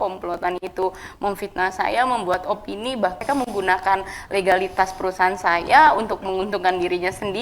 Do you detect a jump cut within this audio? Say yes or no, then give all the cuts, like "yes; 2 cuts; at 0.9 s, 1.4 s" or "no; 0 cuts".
yes; 1 cut; at 3.2 s